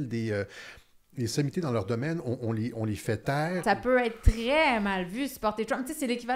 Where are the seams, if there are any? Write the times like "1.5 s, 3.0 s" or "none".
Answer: 3.6 s